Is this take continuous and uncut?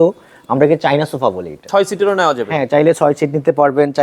no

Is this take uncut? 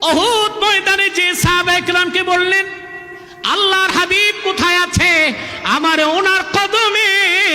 yes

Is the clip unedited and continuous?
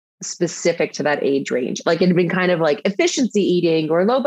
yes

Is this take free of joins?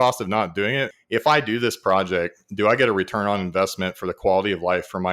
no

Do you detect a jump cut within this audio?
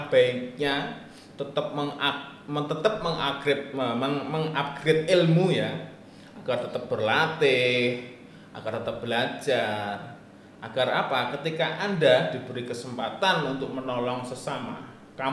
no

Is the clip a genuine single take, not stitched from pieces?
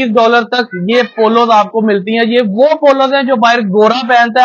yes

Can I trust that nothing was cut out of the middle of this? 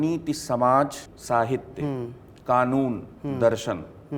no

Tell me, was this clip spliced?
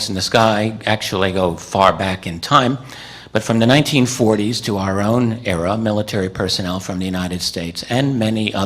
yes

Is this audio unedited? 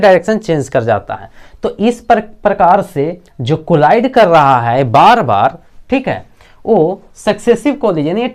yes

